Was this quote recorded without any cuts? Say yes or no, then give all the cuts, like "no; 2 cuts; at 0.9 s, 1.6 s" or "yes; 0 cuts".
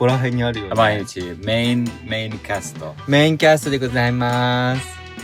yes; 0 cuts